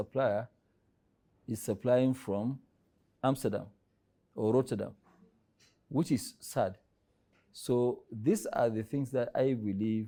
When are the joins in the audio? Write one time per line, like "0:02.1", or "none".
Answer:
none